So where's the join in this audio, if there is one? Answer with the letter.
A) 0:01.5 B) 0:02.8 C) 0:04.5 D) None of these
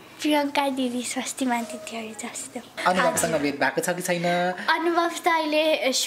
B